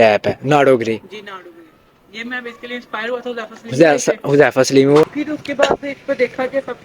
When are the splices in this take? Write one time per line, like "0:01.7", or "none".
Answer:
0:05.1